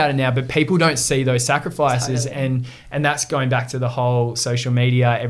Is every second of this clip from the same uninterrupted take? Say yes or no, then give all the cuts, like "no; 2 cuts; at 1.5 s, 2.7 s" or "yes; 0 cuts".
yes; 0 cuts